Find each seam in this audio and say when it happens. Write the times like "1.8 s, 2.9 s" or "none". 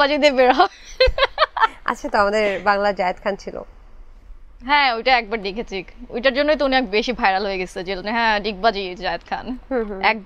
none